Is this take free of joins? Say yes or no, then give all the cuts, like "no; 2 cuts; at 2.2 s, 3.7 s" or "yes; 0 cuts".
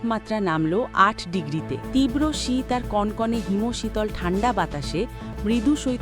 no; 1 cut; at 1.8 s